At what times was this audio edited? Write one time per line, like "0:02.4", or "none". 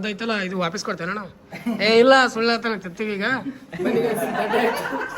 none